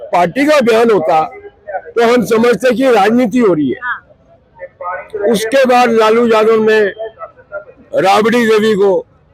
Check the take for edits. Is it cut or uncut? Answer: uncut